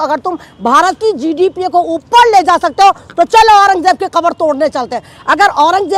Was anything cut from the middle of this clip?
no; 0 cuts

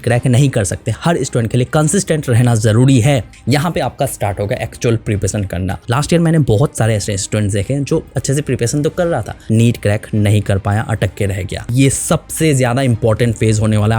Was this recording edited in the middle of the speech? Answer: yes; 4 cuts; at 3.3 s, 5.8 s, 9.3 s, 11.6 s

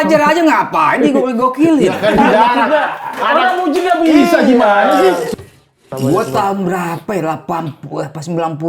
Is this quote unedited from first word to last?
no; 1 cut; at 5.5 s

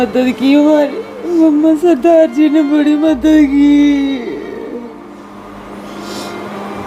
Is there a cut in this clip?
no; 0 cuts

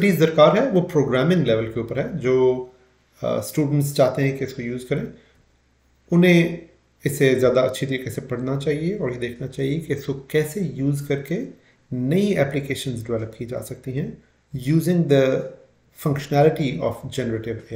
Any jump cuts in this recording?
no; 0 cuts

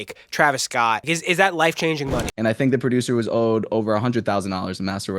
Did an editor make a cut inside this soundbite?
yes; 2 cuts; at 1.0 s, 2.4 s

